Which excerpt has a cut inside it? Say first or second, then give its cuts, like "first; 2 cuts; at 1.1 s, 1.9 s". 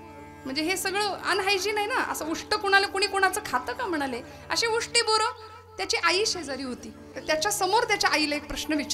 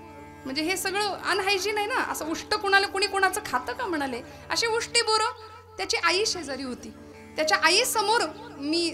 first; 1 cut; at 7.2 s